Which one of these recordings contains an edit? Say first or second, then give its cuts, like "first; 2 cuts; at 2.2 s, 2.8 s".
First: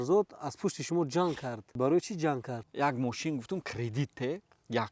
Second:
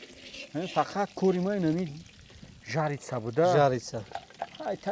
first; 2 cuts; at 1.8 s, 2.6 s